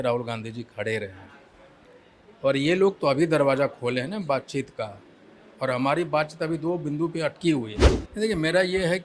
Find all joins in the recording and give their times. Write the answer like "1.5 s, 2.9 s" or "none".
7.8 s